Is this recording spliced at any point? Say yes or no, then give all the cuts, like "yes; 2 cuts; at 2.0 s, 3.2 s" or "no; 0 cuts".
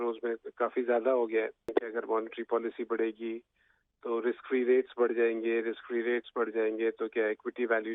yes; 1 cut; at 1.6 s